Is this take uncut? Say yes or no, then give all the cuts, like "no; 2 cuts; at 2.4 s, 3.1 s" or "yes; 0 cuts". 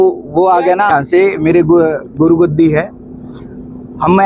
no; 1 cut; at 0.9 s